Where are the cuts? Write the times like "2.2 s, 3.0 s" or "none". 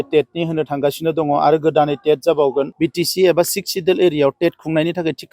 2.7 s